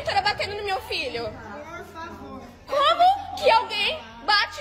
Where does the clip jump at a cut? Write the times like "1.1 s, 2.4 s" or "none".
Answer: none